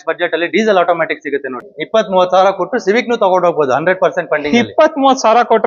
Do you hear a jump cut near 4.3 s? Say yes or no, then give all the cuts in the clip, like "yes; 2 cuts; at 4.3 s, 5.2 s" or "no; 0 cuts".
no; 1 cut; at 1.7 s